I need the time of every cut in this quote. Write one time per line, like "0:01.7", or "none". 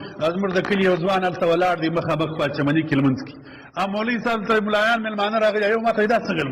none